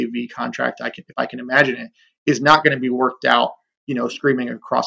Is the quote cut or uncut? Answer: uncut